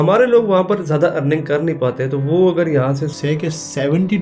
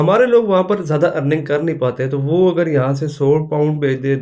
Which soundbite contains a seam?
first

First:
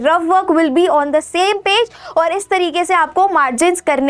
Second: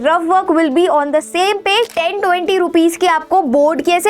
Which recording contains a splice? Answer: second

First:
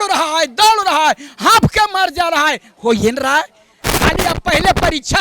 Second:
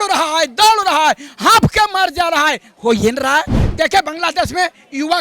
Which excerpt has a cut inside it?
second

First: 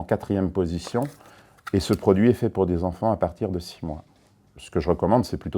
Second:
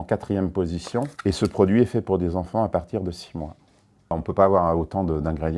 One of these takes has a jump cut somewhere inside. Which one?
second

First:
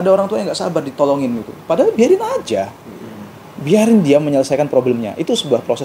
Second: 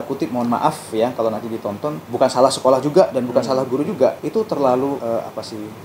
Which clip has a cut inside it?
second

